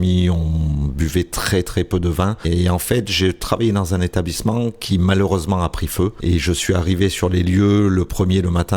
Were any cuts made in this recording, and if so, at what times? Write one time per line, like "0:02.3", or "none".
0:02.5
0:06.2